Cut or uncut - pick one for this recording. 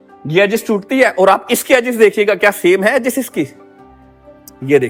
uncut